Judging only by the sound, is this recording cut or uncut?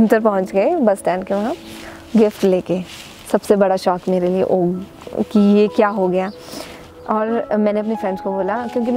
uncut